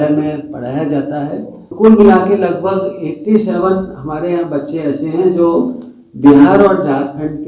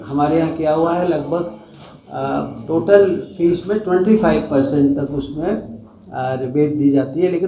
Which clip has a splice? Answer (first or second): first